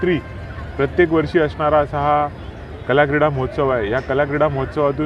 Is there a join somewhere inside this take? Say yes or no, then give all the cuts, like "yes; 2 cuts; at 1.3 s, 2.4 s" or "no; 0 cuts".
no; 0 cuts